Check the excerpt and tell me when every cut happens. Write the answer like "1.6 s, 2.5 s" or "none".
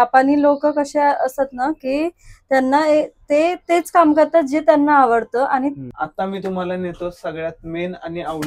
6.0 s